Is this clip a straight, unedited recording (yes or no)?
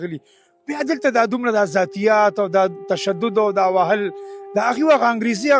yes